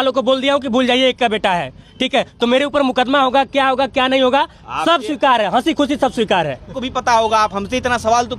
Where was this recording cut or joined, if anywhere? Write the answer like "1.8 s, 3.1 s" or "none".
6.8 s